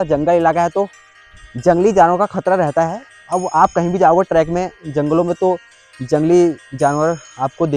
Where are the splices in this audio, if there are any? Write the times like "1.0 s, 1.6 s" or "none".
none